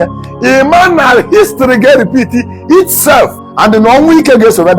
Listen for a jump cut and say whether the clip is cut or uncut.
cut